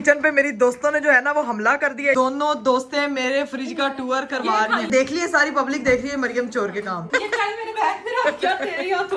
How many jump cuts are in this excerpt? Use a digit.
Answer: 3